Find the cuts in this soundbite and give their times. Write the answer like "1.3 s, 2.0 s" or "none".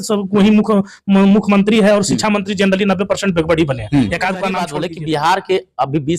4.7 s